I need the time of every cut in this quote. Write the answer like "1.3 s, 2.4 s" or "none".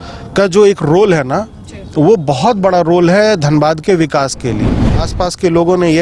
5.0 s

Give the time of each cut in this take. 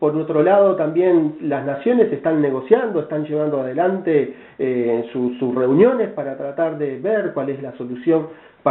3.5 s

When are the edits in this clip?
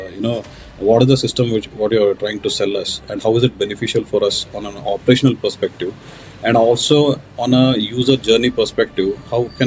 none

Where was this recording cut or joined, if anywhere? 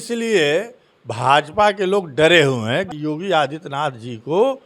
2.9 s

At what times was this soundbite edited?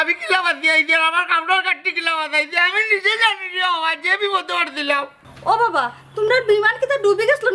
5.1 s

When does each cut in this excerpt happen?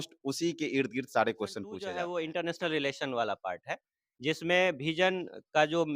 1.9 s

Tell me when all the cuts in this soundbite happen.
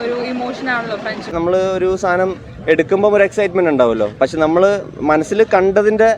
1.3 s

